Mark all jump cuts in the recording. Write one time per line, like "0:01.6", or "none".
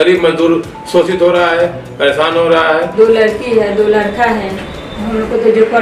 0:02.9

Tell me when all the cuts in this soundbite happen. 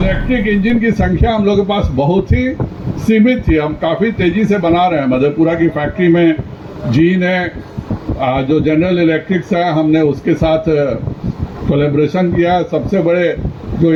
none

